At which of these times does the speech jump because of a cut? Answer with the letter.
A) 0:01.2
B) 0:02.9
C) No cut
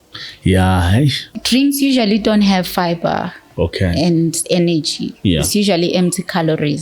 A